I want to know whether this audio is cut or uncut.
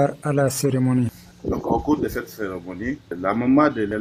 uncut